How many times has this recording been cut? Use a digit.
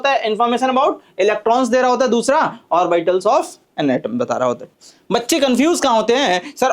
1